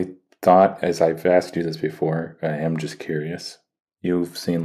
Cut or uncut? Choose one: uncut